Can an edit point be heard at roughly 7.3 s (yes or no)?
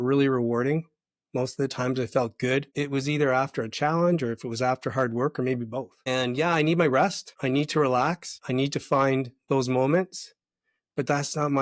yes